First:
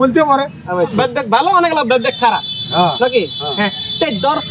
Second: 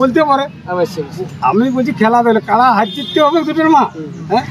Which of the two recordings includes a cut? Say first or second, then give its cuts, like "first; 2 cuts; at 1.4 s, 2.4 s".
first; 1 cut; at 0.9 s